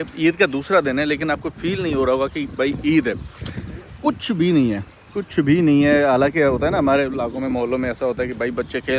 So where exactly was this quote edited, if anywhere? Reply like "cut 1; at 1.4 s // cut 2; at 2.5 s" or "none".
none